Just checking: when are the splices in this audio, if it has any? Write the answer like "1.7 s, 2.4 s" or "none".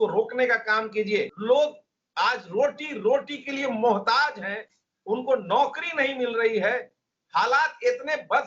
1.3 s